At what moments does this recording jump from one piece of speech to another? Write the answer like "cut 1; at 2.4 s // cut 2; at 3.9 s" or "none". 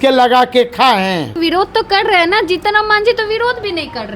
cut 1; at 1.4 s